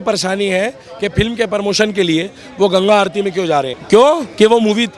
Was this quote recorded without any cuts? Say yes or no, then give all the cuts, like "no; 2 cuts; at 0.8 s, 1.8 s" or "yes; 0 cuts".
no; 1 cut; at 3.8 s